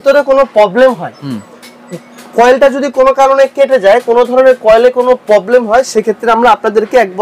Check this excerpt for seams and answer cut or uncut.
uncut